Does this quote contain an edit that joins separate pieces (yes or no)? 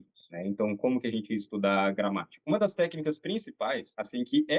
yes